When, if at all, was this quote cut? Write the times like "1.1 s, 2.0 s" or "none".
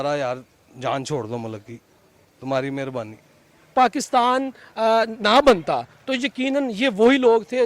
3.6 s